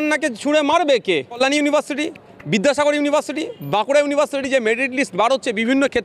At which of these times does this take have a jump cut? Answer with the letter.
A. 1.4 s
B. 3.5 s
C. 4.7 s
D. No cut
A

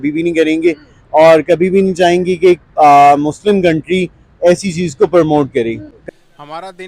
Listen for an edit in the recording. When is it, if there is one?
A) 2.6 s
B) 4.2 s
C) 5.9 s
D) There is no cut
C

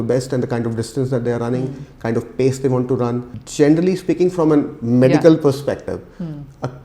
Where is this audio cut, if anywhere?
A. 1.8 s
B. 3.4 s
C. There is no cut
B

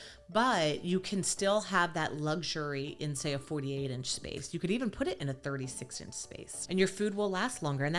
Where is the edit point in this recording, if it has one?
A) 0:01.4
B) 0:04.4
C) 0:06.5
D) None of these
C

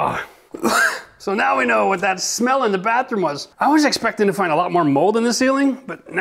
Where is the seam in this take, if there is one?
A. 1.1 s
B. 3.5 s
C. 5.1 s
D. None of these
B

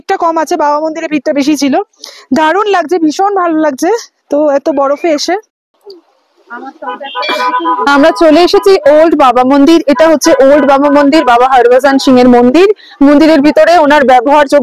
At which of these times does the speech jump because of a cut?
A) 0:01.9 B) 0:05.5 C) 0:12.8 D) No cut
B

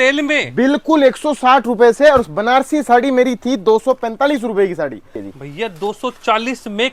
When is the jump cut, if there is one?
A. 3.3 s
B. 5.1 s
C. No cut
B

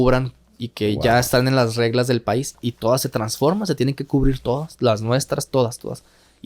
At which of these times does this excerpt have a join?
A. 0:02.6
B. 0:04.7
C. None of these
A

